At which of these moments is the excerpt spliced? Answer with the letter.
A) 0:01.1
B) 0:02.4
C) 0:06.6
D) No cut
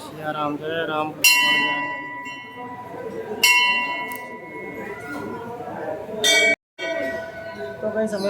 C